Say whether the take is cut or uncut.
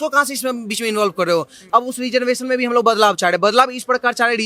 cut